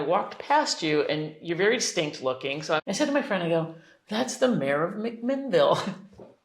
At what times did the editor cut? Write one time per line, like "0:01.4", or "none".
0:02.8